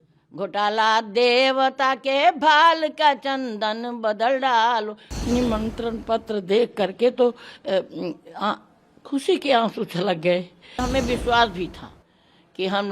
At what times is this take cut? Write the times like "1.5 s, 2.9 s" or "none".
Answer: 5.0 s, 10.8 s

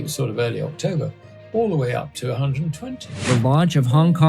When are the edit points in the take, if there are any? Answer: 3.1 s

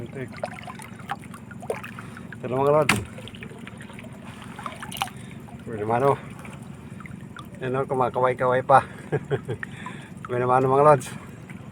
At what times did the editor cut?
none

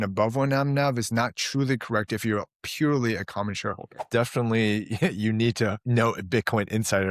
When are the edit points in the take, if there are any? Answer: 4.0 s, 5.8 s

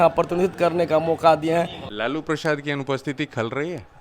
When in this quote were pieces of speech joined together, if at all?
1.8 s

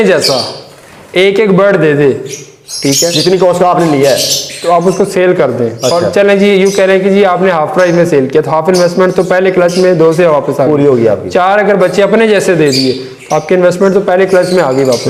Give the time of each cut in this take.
none

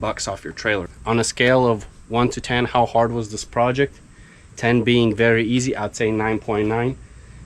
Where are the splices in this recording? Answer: 0.9 s

